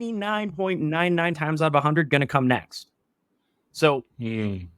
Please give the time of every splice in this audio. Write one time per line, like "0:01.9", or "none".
0:01.3

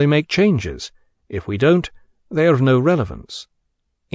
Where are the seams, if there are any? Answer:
0:03.0

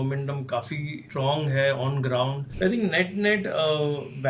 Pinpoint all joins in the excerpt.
0:01.0
0:02.4

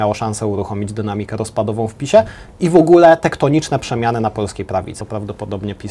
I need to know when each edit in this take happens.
0:05.0

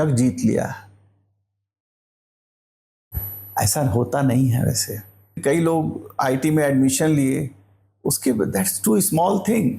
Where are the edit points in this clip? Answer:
0:05.4

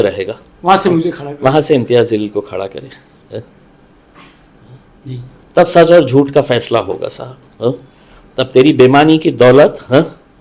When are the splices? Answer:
none

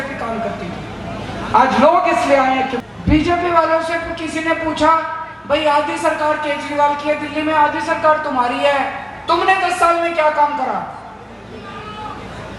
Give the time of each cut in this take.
0:02.8

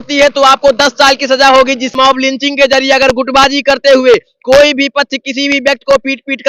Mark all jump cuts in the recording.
0:01.9

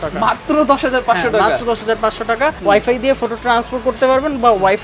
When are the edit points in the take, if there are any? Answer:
0:02.6

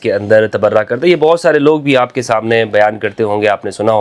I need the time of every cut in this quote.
none

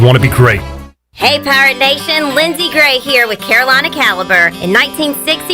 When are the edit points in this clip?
0:01.1

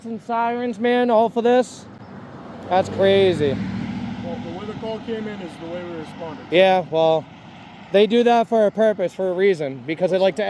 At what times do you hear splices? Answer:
none

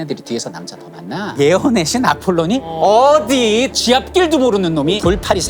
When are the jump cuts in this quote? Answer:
0:02.7

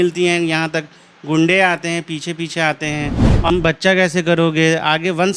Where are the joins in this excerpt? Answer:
0:03.5

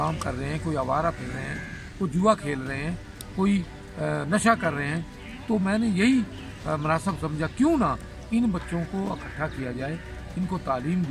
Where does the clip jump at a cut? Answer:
none

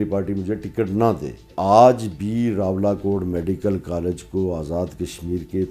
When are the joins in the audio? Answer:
0:01.5

